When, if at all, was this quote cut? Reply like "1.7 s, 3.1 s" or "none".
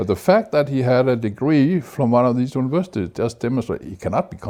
none